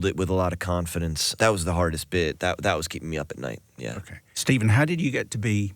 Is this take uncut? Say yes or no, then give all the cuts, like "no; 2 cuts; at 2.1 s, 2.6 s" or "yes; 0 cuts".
yes; 0 cuts